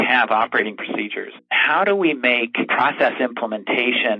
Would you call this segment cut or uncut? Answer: cut